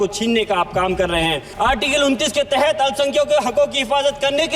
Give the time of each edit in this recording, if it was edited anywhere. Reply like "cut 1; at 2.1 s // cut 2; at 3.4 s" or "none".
cut 1; at 1.5 s